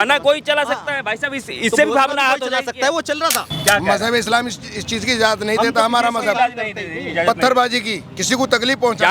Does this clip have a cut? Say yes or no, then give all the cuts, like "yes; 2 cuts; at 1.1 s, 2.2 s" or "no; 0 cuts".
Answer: yes; 1 cut; at 3.5 s